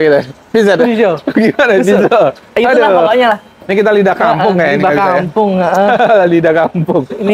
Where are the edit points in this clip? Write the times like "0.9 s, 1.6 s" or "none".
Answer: none